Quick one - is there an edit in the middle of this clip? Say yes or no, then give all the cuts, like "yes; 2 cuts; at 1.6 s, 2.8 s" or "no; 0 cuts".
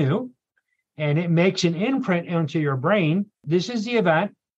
yes; 1 cut; at 3.4 s